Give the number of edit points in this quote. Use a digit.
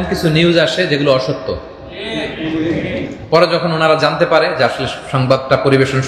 1